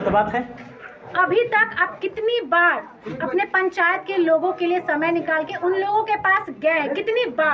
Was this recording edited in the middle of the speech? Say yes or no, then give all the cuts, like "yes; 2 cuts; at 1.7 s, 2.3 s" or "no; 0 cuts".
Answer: yes; 1 cut; at 1.0 s